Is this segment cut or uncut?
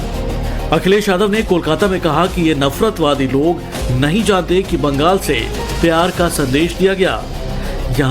cut